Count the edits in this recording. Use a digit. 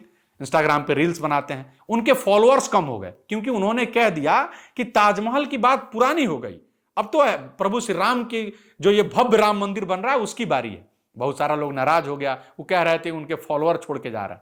0